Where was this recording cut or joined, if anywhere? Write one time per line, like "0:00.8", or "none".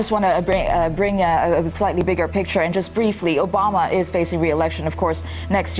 0:02.0